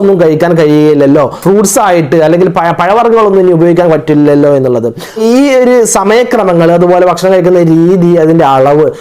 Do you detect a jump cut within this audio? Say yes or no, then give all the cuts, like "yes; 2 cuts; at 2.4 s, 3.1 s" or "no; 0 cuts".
yes; 1 cut; at 5.2 s